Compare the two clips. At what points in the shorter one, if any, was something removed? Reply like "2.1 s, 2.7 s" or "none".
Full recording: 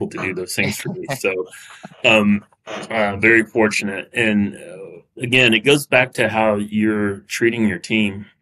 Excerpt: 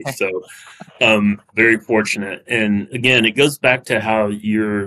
1.5 s, 2.9 s